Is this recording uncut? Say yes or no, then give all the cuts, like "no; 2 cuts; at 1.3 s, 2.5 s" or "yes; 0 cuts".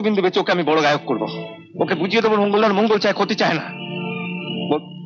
yes; 0 cuts